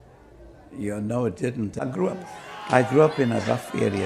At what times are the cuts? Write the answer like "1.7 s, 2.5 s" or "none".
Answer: 1.8 s